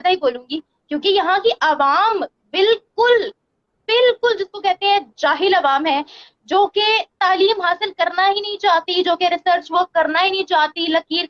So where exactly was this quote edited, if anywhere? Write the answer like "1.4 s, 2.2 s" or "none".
none